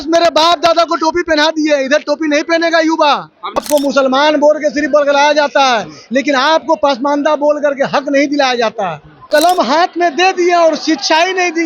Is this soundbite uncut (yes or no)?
no